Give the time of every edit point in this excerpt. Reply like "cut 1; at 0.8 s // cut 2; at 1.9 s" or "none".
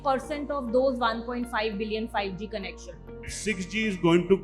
cut 1; at 3.3 s